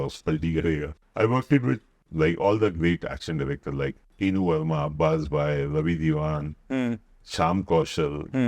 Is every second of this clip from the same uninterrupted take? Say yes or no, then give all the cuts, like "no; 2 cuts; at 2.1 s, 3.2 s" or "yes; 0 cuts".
no; 1 cut; at 1.0 s